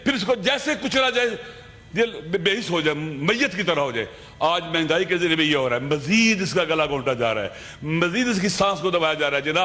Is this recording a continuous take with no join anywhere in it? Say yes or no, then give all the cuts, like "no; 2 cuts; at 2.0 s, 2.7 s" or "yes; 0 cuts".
yes; 0 cuts